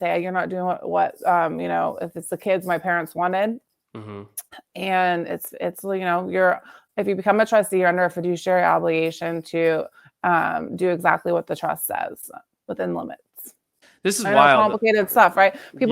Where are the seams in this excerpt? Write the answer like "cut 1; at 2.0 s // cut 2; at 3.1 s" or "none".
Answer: cut 1; at 13.8 s